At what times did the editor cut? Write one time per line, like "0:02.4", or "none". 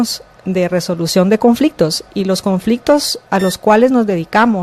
0:03.2